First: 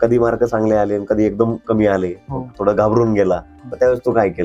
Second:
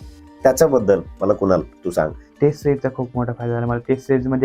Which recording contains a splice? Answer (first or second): second